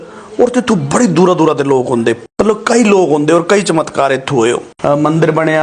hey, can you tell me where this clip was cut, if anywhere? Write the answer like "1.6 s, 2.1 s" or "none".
2.2 s, 4.7 s